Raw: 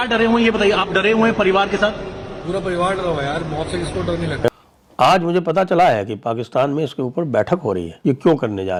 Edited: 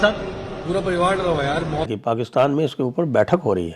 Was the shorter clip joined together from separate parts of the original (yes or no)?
yes